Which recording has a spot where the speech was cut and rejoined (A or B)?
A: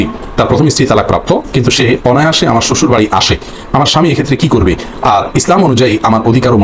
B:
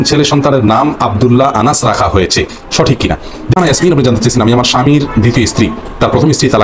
B